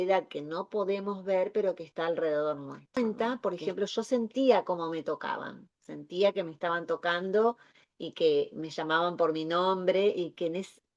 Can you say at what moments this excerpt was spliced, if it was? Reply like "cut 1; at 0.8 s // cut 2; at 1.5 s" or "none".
cut 1; at 3.0 s